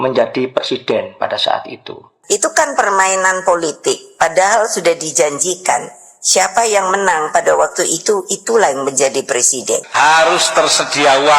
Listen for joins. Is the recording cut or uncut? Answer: cut